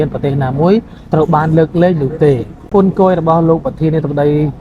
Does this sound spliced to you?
yes; 1 cut; at 2.7 s

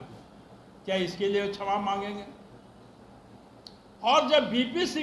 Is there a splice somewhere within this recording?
no; 0 cuts

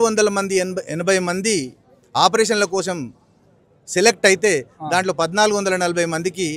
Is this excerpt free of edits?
yes; 0 cuts

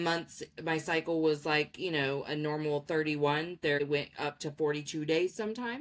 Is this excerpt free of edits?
no; 1 cut; at 3.8 s

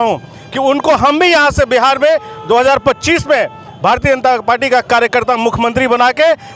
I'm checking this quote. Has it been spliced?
no; 0 cuts

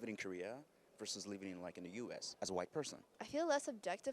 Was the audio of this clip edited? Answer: yes; 1 cut; at 2.3 s

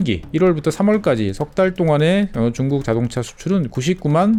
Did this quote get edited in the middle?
no; 0 cuts

